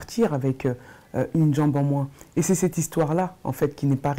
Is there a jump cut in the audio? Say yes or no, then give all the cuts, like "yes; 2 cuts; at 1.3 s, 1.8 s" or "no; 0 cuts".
no; 0 cuts